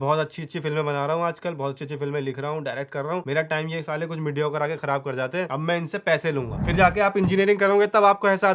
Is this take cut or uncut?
cut